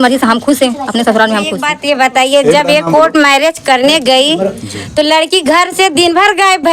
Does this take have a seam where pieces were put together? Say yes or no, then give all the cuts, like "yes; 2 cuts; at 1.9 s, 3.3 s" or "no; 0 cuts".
yes; 1 cut; at 1.6 s